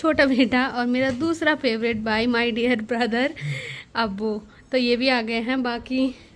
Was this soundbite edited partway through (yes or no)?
no